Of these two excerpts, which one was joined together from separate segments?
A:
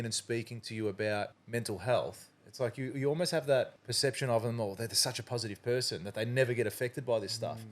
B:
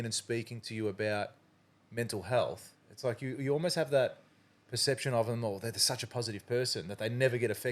A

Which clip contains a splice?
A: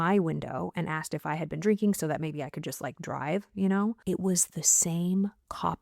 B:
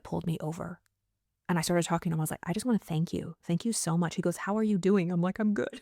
A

